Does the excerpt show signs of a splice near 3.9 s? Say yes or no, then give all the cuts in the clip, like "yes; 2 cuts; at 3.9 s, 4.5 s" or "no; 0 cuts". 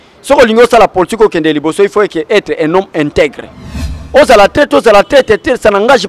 yes; 1 cut; at 3.9 s